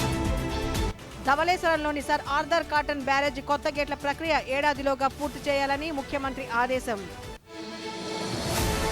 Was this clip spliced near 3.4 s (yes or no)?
no